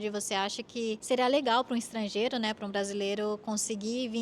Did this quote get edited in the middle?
yes; 1 cut; at 1.0 s

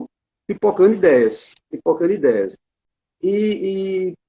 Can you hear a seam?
no; 0 cuts

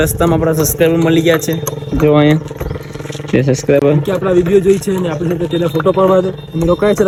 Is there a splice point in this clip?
no; 0 cuts

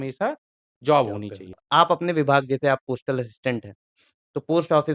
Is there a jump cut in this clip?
yes; 1 cut; at 1.6 s

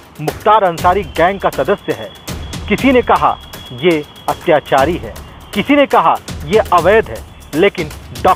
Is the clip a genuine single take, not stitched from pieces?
yes; 0 cuts

